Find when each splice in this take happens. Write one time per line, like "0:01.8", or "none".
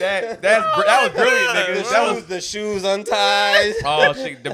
none